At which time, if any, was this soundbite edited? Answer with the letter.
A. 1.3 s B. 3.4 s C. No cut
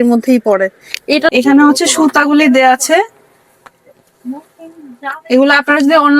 A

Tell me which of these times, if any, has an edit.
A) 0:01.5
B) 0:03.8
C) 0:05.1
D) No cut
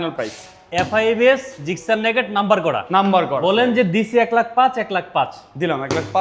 B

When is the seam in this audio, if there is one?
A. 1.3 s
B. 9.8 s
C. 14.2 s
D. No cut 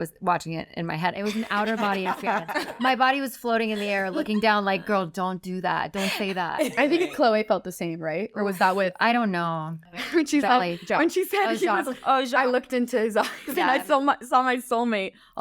B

